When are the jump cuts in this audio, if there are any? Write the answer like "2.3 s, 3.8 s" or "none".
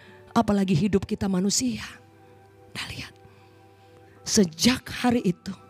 none

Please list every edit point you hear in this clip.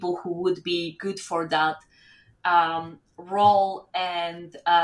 none

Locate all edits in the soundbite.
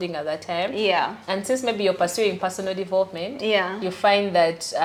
none

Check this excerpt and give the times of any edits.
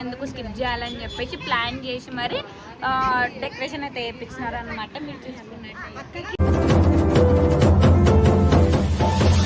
none

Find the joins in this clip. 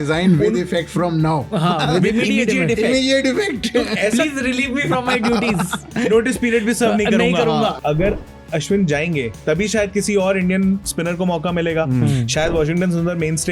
7.8 s

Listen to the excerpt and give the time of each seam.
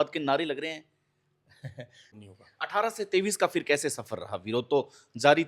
2.1 s

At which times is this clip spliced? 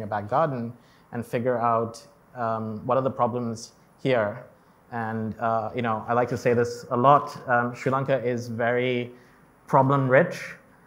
none

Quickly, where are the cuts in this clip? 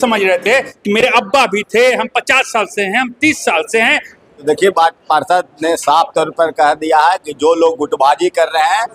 4.4 s

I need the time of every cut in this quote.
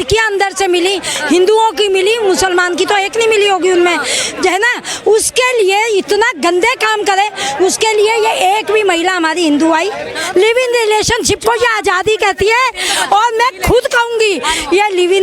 10.2 s

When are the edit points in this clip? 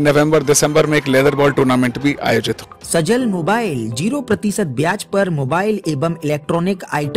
2.8 s

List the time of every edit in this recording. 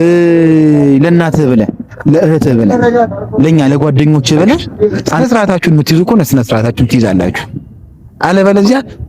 5.1 s

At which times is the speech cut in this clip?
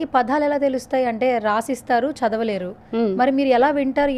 none

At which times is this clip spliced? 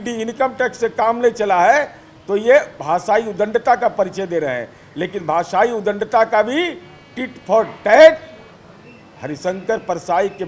none

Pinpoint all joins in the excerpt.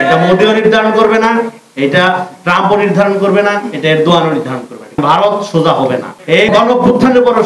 5.0 s, 6.5 s

